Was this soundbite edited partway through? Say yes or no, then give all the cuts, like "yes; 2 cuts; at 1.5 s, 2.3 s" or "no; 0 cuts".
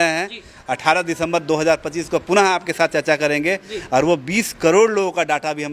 no; 0 cuts